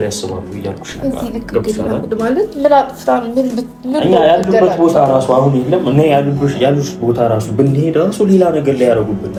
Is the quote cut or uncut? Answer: uncut